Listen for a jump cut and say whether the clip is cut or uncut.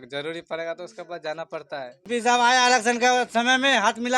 cut